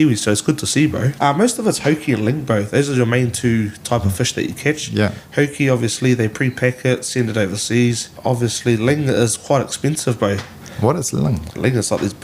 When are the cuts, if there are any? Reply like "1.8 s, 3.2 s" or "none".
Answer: 1.1 s, 8.1 s